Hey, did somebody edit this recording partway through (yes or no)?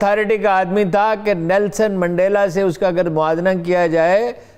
no